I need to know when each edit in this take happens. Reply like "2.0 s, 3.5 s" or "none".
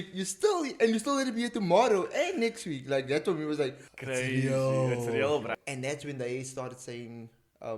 3.9 s, 5.5 s